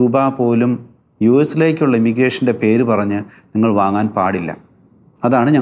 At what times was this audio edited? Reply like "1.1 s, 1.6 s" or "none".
none